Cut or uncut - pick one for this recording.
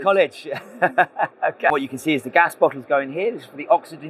cut